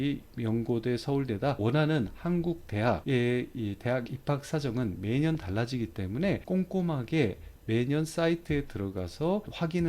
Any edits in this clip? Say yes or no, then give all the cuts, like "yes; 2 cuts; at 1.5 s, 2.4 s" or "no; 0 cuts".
yes; 1 cut; at 1.6 s